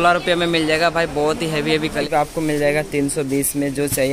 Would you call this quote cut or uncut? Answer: cut